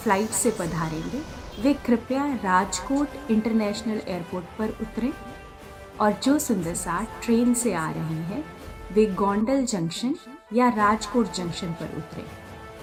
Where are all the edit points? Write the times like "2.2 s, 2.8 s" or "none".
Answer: none